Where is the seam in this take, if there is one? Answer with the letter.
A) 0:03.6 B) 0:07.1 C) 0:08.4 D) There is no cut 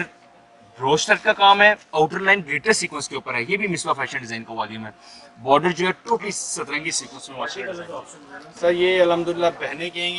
C